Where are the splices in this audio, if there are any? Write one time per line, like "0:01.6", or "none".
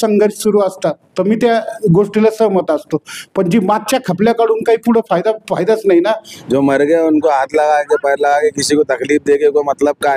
0:06.3